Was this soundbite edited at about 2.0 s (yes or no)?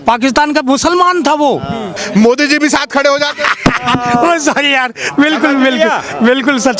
yes